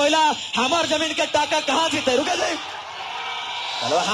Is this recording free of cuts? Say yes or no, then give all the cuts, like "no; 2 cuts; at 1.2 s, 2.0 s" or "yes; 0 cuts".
yes; 0 cuts